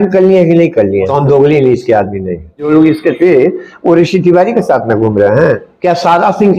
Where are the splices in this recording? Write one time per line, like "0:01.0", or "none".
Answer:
0:01.1
0:02.7
0:05.7